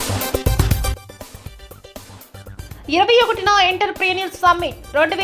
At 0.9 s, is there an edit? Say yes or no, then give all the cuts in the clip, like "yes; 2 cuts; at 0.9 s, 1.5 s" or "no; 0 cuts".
yes; 2 cuts; at 0.9 s, 2.5 s